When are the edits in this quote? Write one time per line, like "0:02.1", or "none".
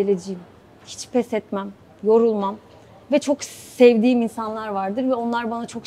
none